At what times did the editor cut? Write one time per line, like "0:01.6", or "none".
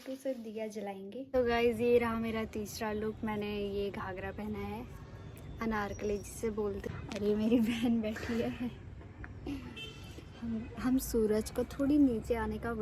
0:01.3
0:06.8